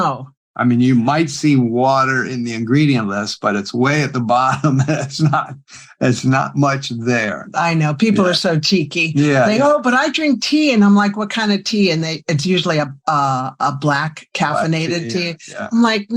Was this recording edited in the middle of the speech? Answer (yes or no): no